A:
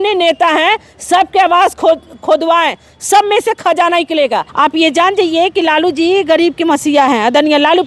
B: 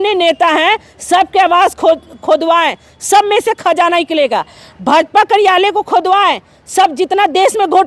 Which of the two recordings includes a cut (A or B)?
A